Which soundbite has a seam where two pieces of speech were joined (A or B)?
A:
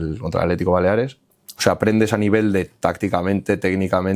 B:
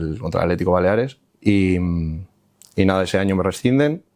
A